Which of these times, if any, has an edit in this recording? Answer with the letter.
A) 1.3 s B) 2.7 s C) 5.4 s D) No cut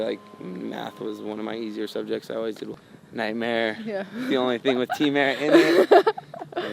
B